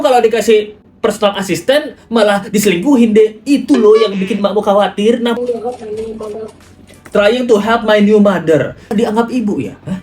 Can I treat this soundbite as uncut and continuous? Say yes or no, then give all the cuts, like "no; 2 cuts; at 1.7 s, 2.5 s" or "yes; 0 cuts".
no; 2 cuts; at 5.4 s, 8.9 s